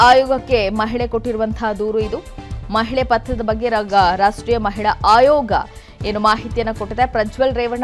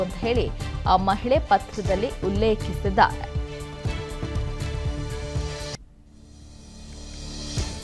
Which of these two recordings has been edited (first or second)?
second